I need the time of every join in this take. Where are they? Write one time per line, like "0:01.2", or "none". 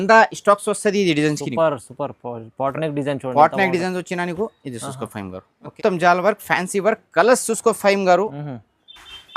0:05.7